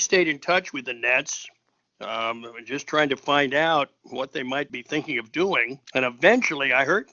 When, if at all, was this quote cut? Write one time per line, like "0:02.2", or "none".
0:04.8
0:05.8